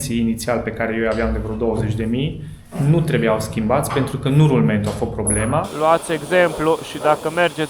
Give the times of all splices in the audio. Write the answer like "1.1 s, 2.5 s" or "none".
5.7 s